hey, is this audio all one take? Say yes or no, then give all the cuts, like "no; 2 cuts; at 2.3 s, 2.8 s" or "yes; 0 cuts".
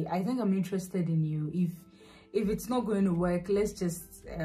yes; 0 cuts